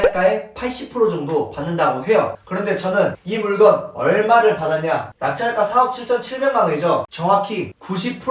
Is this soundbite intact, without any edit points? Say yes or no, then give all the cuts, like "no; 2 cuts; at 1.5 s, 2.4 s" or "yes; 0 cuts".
no; 1 cut; at 7.1 s